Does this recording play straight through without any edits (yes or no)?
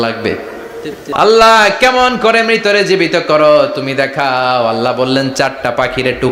no